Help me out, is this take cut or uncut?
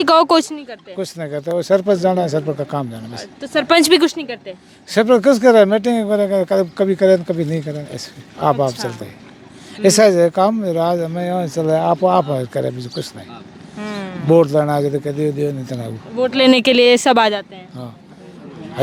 uncut